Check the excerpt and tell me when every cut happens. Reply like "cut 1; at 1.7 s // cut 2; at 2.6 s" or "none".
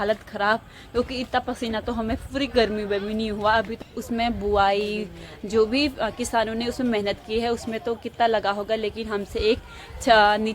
cut 1; at 3.8 s